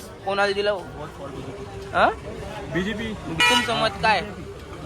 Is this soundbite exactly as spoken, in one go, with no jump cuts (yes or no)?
no